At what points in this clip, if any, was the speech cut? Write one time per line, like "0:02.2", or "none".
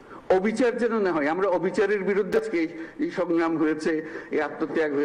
0:02.3